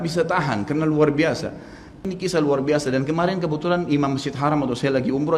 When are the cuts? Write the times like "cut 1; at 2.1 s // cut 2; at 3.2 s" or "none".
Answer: cut 1; at 2.0 s